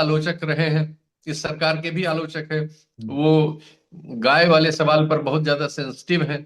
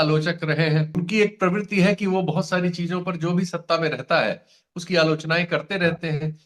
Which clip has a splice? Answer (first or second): second